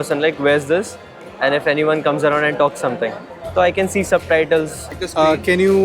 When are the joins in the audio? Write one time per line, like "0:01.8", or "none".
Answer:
0:04.9